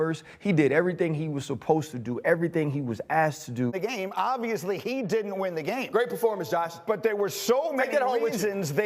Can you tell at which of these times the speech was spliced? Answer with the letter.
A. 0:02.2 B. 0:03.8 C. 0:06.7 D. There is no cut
B